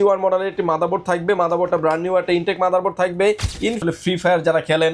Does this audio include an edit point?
yes; 1 cut; at 3.8 s

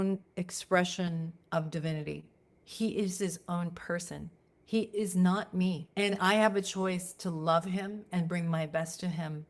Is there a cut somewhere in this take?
yes; 2 cuts; at 1.4 s, 5.8 s

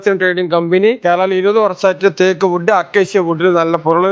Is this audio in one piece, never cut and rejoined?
no; 1 cut; at 1.0 s

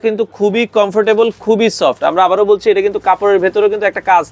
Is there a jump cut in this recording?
no; 0 cuts

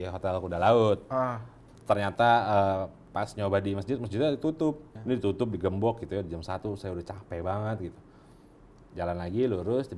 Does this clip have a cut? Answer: yes; 2 cuts; at 1.7 s, 4.9 s

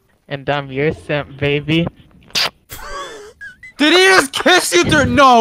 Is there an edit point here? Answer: no; 0 cuts

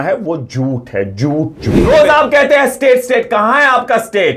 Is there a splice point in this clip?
yes; 1 cut; at 1.8 s

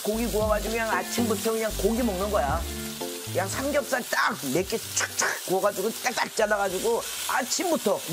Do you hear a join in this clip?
no; 0 cuts

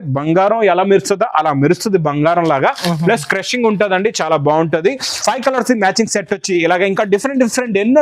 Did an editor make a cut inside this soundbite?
yes; 1 cut; at 5.1 s

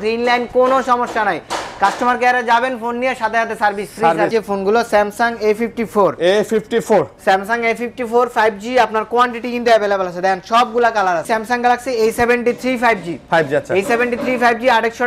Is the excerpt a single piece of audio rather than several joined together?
no; 2 cuts; at 4.3 s, 11.2 s

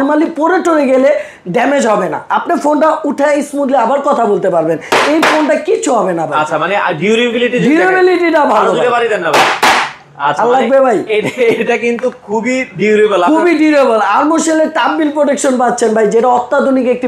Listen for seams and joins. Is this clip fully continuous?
yes; 0 cuts

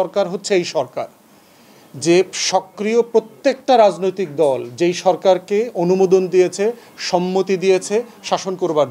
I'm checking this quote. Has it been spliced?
no; 0 cuts

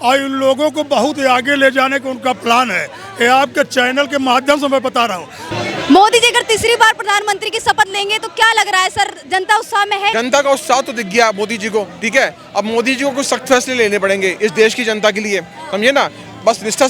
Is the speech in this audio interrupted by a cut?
yes; 2 cuts; at 5.4 s, 10.1 s

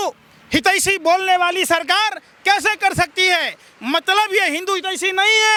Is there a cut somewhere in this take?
no; 0 cuts

